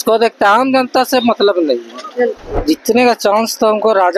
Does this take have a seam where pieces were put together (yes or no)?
yes